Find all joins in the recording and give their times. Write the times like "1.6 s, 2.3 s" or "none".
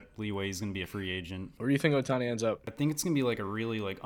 1.5 s, 2.7 s